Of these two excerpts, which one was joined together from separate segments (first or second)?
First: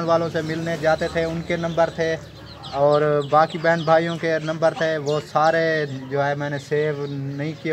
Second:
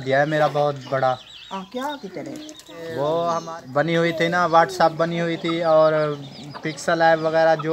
second